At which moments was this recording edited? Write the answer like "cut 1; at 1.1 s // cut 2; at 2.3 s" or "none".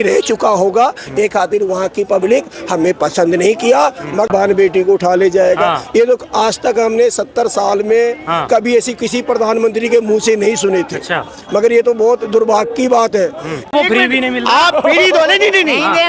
cut 1; at 4.3 s // cut 2; at 13.7 s